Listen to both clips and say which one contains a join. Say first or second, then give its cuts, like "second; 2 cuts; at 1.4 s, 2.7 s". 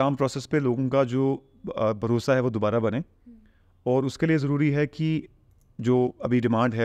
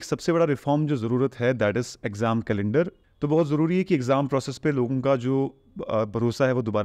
second; 1 cut; at 3.0 s